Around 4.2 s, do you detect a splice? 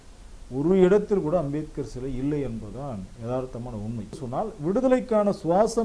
yes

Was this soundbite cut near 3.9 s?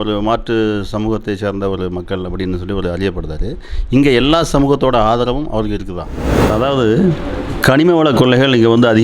no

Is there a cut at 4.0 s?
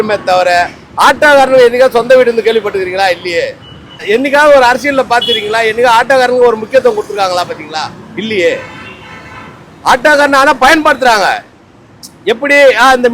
yes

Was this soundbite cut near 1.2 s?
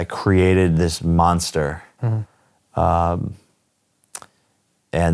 yes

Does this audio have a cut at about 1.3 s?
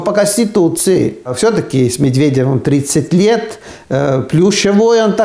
yes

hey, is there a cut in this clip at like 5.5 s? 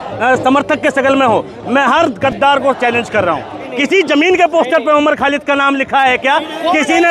no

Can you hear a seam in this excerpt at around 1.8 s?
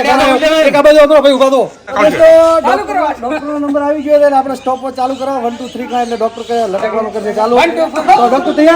yes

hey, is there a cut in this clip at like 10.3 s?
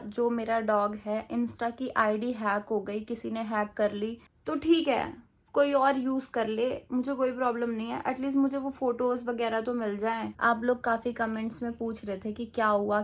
yes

